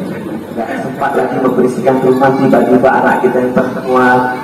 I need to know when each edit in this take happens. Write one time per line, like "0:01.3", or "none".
0:00.9